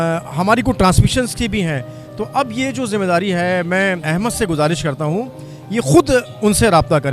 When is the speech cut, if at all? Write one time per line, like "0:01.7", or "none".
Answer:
0:04.0